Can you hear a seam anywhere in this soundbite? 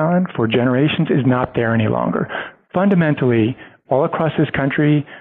no; 0 cuts

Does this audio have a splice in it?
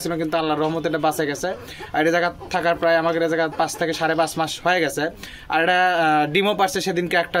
no; 0 cuts

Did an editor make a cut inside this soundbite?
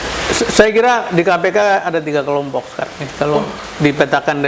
no; 0 cuts

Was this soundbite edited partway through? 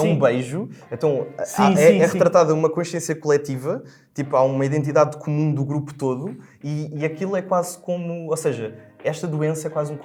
no; 0 cuts

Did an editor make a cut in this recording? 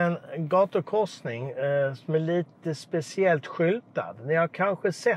no; 0 cuts

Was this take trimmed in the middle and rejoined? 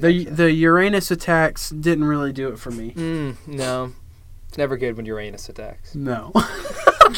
no; 0 cuts

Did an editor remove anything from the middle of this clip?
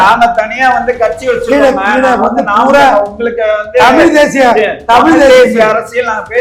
no; 0 cuts

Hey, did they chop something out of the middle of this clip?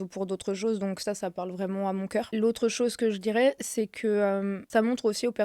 yes; 2 cuts; at 2.3 s, 4.6 s

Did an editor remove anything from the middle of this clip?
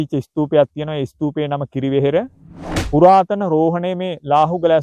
yes; 1 cut; at 2.4 s

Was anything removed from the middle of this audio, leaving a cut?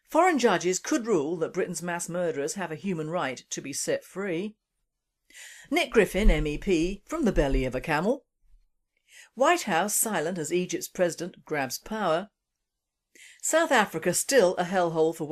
yes; 1 cut; at 1.8 s

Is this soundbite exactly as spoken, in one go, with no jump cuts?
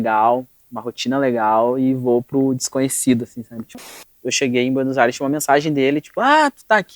no; 1 cut; at 4.0 s

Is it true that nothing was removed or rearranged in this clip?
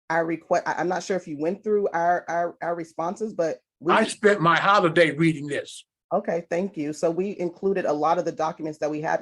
yes; 0 cuts

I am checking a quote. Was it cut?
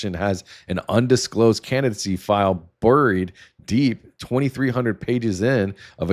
no; 0 cuts

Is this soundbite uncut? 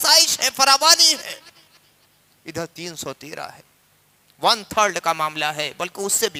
yes; 0 cuts

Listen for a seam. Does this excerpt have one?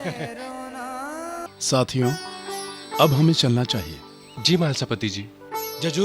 yes; 1 cut; at 1.5 s

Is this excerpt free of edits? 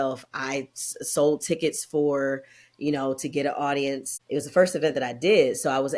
no; 1 cut; at 4.1 s

